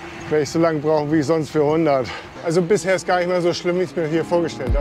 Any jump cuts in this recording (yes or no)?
yes